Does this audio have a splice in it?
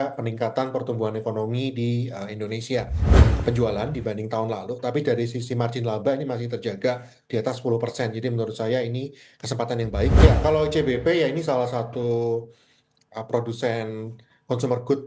yes; 2 cuts; at 3.0 s, 10.2 s

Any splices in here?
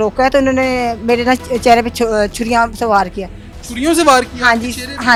no; 0 cuts

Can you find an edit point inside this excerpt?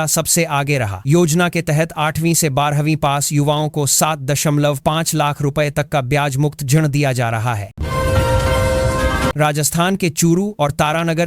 yes; 3 cuts; at 1.1 s, 7.7 s, 9.3 s

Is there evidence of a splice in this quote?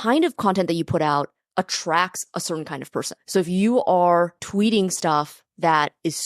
yes; 2 cuts; at 3.2 s, 4.4 s

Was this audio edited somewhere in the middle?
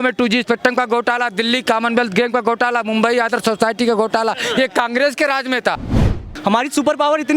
yes; 1 cut; at 6.1 s

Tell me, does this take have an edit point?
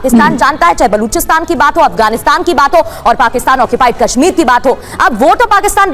no; 0 cuts

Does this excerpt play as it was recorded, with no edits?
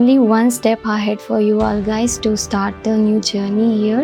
yes; 0 cuts

